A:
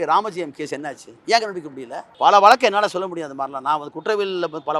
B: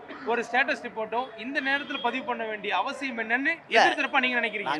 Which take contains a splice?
A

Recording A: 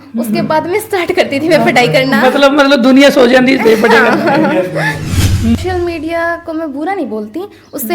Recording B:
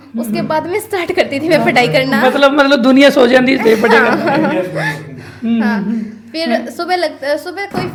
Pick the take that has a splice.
A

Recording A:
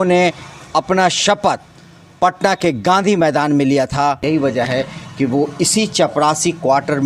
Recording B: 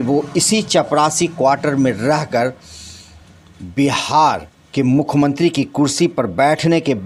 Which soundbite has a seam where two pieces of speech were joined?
A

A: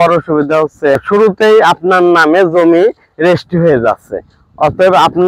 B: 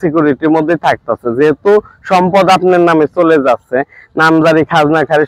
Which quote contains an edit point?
A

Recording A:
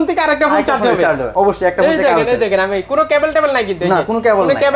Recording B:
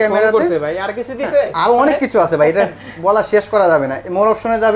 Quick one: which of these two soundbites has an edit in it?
A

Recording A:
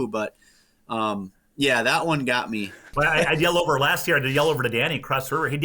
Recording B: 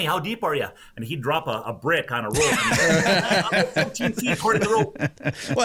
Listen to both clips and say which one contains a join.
A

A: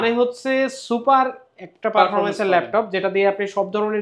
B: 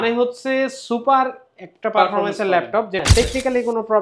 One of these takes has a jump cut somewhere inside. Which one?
B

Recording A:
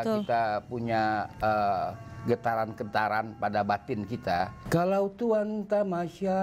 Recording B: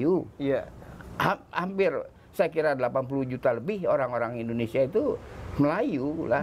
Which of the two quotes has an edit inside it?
A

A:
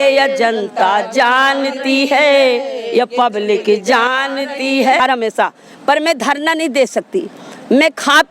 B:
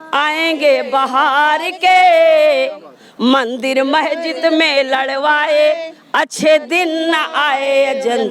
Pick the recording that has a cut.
A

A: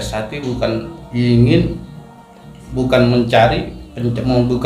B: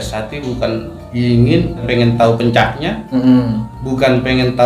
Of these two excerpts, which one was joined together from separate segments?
B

